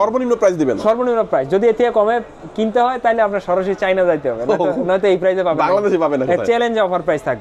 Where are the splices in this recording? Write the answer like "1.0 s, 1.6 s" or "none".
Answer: none